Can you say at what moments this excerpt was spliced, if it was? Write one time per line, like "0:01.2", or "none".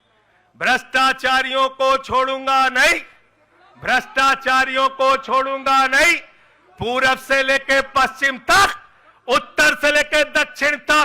none